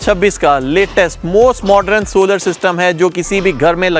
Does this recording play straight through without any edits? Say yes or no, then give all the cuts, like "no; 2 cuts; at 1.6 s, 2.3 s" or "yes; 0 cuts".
yes; 0 cuts